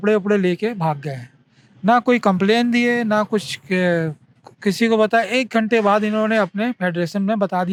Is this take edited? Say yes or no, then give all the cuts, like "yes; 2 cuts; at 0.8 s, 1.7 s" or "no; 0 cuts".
no; 0 cuts